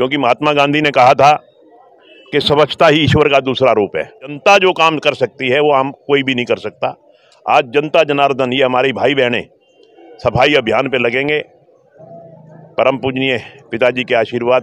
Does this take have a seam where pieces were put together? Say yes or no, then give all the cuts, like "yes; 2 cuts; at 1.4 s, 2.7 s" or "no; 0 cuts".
yes; 1 cut; at 4.3 s